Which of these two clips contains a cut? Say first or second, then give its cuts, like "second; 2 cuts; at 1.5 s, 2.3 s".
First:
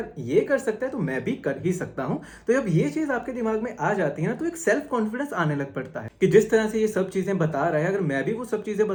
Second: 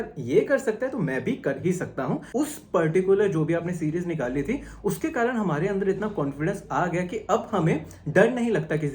second; 1 cut; at 2.2 s